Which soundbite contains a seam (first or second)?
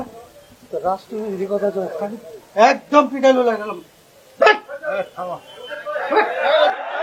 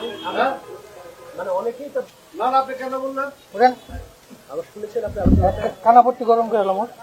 second